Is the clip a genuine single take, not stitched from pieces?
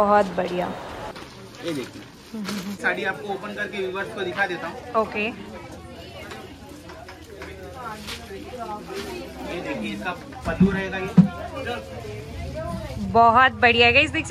no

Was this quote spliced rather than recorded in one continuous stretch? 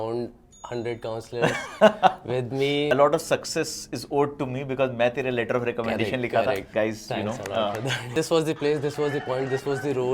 yes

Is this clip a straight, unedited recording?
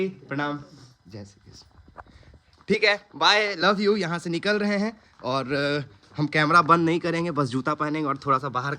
yes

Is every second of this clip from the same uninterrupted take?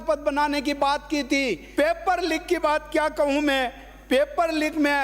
no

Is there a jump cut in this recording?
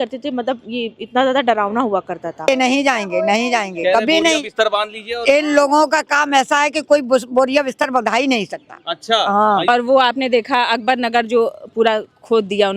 yes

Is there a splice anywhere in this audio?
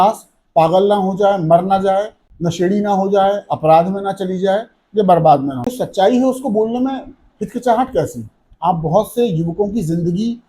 yes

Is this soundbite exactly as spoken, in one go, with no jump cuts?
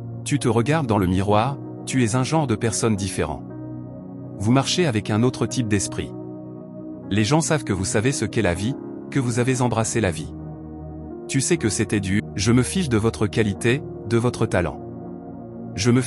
no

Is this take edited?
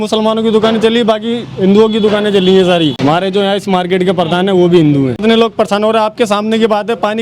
yes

